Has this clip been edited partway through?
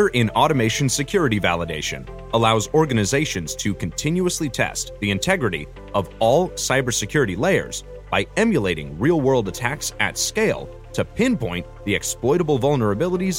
no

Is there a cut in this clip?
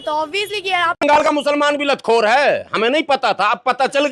yes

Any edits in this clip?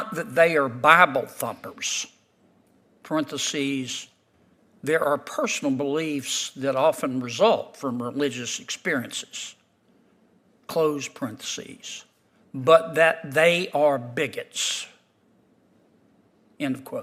no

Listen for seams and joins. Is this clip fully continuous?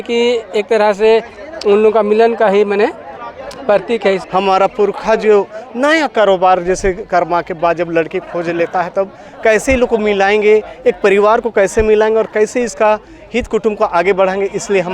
no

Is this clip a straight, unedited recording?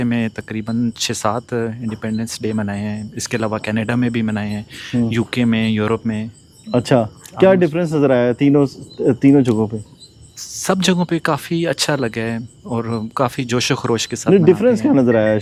yes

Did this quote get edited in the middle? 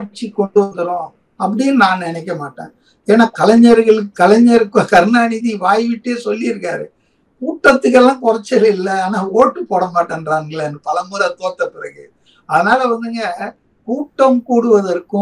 no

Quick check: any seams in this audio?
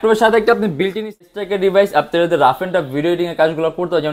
yes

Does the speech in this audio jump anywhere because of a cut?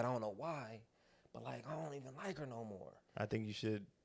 yes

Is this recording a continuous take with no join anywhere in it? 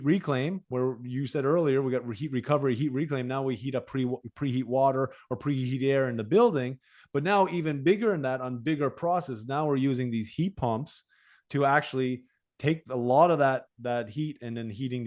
yes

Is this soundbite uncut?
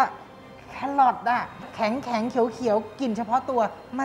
no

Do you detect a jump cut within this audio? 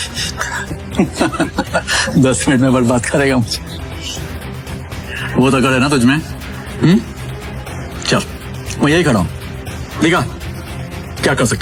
no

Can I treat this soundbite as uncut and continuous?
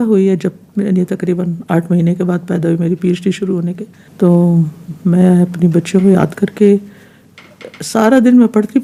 yes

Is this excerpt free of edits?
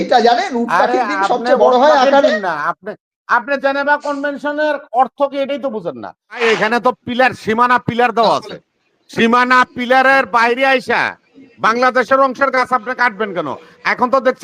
no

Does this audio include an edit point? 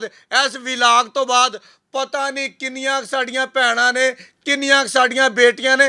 no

